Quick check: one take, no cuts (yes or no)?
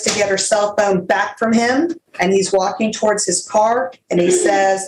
no